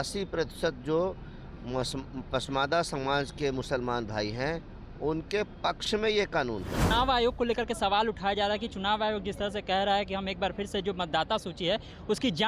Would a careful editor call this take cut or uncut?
cut